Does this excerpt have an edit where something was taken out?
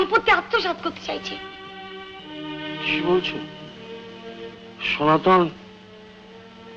no; 0 cuts

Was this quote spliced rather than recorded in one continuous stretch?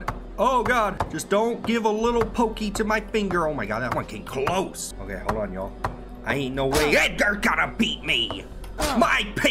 yes; 2 cuts; at 1.1 s, 4.9 s

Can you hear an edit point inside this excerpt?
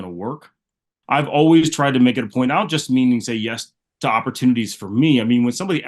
yes; 1 cut; at 0.9 s

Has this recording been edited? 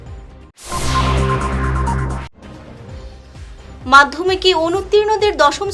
yes; 2 cuts; at 2.2 s, 3.2 s

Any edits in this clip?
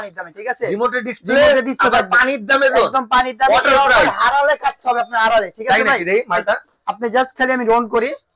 no; 0 cuts

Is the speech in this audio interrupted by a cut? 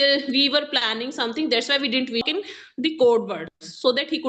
yes; 1 cut; at 2.3 s

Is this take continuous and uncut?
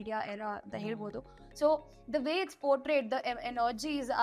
yes; 0 cuts

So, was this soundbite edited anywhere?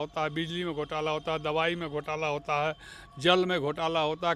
no; 0 cuts

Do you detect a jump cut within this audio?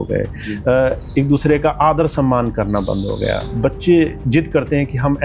no; 0 cuts

